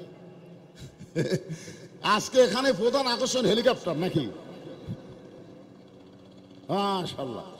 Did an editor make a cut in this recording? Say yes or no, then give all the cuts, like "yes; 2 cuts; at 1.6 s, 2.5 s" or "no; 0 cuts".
no; 0 cuts